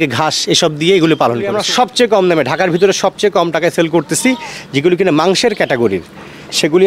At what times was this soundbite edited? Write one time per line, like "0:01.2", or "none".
0:01.6